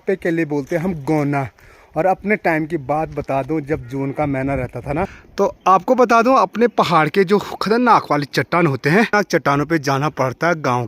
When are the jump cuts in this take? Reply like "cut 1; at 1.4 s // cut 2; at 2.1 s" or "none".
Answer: cut 1; at 5.2 s // cut 2; at 9.1 s